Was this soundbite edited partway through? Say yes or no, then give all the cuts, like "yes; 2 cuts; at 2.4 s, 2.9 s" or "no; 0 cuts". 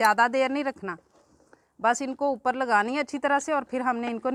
no; 0 cuts